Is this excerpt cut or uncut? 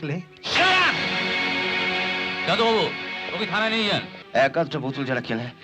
cut